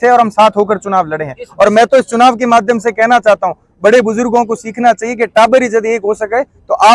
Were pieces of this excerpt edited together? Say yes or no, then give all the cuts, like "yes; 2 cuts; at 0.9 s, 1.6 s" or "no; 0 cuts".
no; 0 cuts